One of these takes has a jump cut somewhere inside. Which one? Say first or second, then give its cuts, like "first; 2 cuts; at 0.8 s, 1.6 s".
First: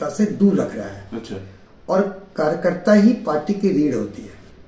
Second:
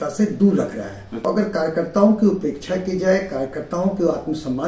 second; 1 cut; at 1.1 s